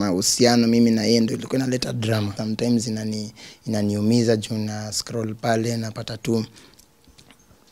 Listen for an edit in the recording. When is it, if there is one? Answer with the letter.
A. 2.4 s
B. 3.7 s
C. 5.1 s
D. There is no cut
A